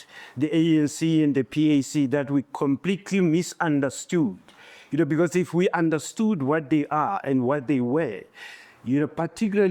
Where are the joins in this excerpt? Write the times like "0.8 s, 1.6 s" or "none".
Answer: none